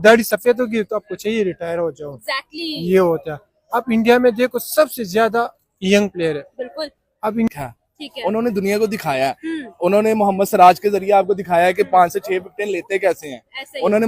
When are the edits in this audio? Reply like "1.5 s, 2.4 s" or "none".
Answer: 7.5 s